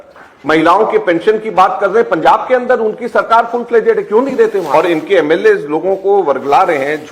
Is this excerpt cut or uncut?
cut